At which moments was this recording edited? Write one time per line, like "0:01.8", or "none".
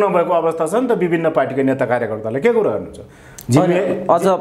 none